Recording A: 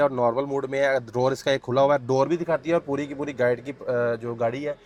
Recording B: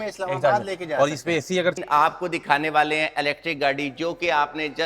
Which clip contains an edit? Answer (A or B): B